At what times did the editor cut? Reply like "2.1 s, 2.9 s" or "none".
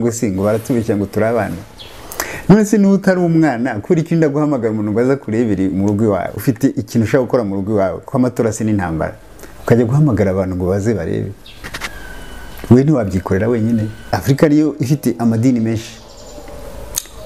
6.4 s, 14.1 s

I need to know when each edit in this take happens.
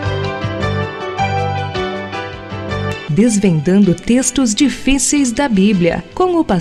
none

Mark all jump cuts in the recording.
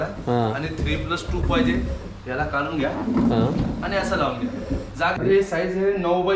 5.2 s

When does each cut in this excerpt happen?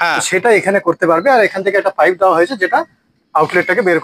none

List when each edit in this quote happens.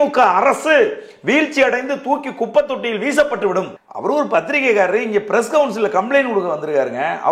3.8 s

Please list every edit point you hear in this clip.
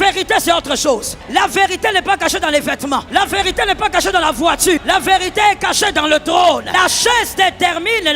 1.1 s, 3.1 s, 4.8 s, 6.7 s

